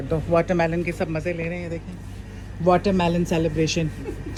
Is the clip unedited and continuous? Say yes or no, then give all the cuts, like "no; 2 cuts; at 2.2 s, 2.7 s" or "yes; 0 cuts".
yes; 0 cuts